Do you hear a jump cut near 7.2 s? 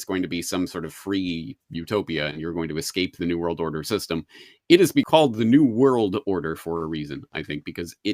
no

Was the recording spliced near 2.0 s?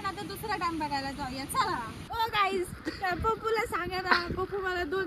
yes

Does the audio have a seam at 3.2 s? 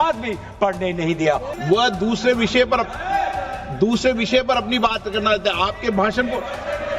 no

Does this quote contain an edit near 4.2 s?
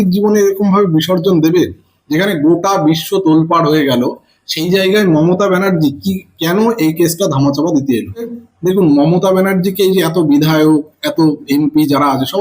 no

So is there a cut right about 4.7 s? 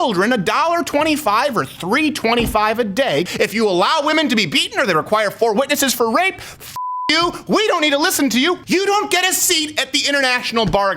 no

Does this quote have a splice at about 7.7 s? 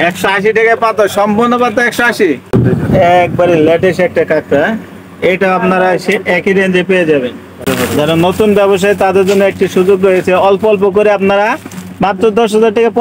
yes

